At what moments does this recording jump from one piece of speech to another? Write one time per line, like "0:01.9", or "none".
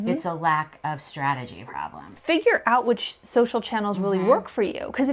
0:02.1